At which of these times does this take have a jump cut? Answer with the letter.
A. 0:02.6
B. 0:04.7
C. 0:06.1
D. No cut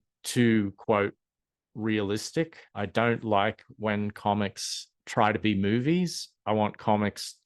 A